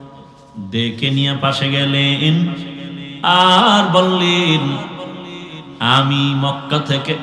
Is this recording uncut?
yes; 0 cuts

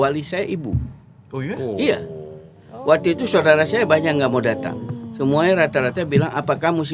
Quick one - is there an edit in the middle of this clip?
no; 0 cuts

